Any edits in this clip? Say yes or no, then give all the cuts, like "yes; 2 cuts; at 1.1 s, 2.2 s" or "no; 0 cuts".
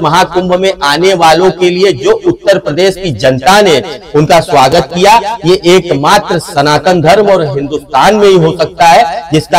no; 0 cuts